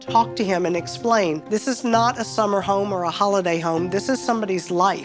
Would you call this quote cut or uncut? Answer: cut